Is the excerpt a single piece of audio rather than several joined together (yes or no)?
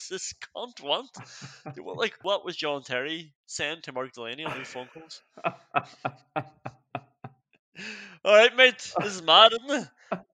no